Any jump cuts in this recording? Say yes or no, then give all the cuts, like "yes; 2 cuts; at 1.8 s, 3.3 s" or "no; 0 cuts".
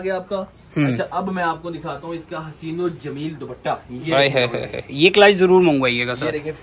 no; 0 cuts